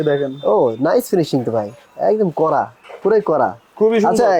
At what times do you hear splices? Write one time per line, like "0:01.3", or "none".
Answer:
none